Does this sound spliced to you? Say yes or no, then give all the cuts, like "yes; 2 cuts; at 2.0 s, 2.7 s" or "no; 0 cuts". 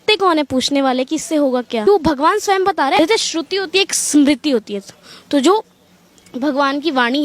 yes; 2 cuts; at 1.9 s, 3.0 s